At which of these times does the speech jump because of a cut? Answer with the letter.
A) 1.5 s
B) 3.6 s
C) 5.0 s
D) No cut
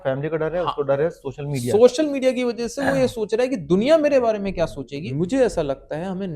C